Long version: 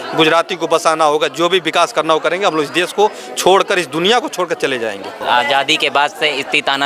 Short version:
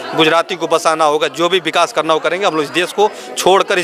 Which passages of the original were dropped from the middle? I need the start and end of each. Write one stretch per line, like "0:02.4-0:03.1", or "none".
none